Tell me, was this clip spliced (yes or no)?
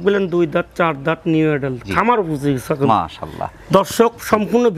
no